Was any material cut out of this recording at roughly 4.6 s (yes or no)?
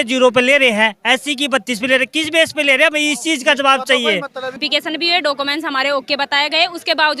yes